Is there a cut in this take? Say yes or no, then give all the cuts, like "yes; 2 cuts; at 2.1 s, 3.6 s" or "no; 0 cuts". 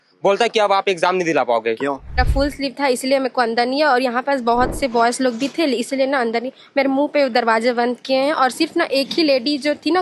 yes; 1 cut; at 2.2 s